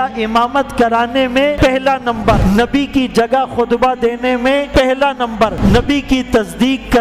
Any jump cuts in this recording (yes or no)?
yes